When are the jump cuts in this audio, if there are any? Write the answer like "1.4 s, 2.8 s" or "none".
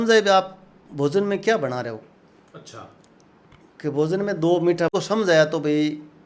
4.9 s